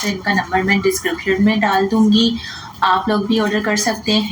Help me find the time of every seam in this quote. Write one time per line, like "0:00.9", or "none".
none